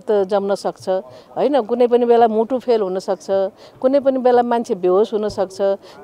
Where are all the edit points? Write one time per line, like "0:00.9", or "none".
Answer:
none